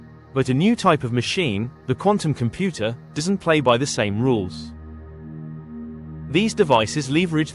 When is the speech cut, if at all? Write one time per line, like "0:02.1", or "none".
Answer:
0:04.5
0:06.1